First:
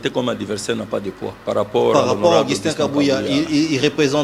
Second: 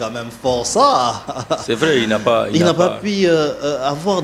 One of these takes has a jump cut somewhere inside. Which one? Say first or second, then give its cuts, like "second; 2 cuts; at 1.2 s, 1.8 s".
first; 1 cut; at 1.3 s